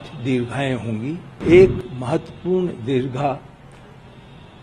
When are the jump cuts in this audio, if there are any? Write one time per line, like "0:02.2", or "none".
0:01.3